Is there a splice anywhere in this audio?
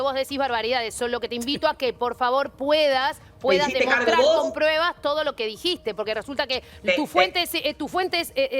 no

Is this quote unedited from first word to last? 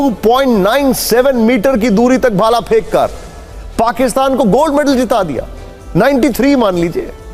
yes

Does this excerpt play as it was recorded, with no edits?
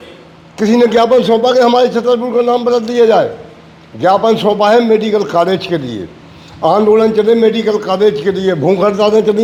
yes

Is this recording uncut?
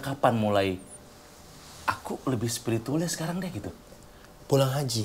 yes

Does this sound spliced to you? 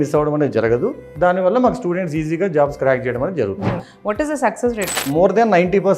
yes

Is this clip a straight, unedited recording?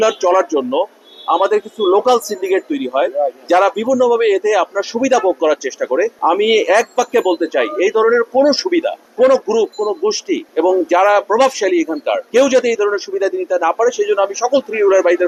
yes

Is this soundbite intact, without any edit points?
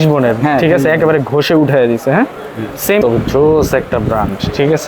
no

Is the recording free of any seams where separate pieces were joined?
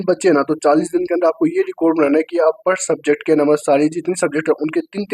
yes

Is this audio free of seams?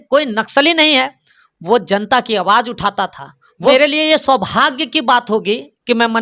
no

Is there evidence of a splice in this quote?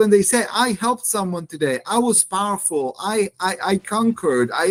no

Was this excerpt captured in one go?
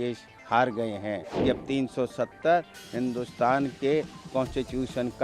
no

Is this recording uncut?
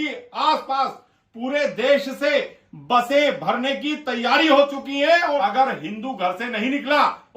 no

